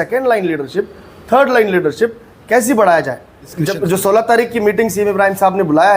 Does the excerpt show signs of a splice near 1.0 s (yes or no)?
no